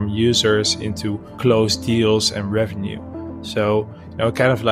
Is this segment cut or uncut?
uncut